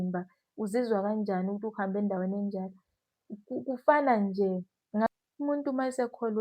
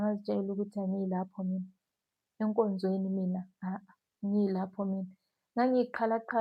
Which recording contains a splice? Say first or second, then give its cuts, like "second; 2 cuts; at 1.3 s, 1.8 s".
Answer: first; 1 cut; at 5.1 s